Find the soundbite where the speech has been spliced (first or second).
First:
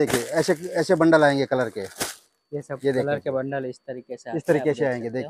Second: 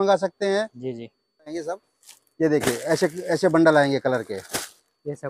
second